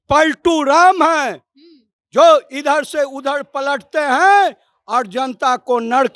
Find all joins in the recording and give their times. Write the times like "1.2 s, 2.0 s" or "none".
none

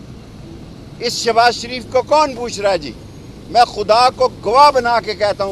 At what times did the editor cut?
none

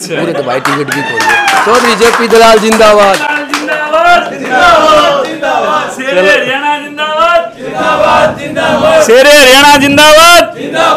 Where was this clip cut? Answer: none

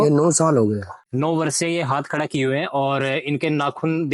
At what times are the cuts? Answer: 1.1 s

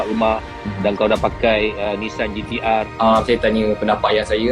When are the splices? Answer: 2.9 s

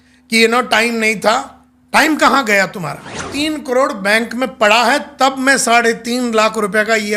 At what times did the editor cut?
3.3 s

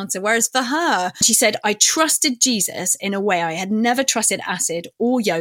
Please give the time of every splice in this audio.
1.3 s

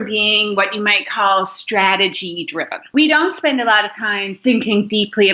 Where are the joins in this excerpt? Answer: 2.9 s, 4.4 s

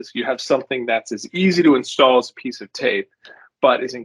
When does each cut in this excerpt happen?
none

